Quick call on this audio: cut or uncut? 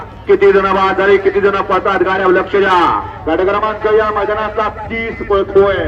uncut